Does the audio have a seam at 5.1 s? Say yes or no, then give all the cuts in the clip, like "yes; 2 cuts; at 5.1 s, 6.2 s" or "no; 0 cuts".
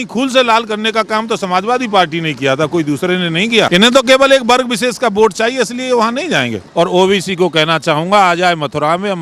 no; 2 cuts; at 3.7 s, 6.6 s